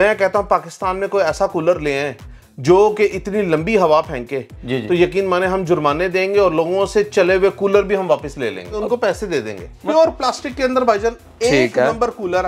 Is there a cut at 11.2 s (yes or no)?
no